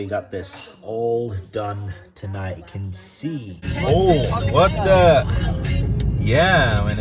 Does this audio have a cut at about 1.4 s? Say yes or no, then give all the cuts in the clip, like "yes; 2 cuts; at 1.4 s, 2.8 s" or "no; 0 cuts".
no; 1 cut; at 3.5 s